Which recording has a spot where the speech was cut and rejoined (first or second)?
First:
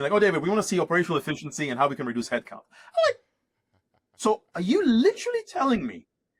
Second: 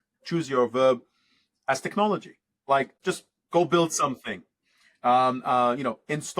second